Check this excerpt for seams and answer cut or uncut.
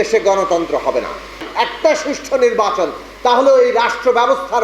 cut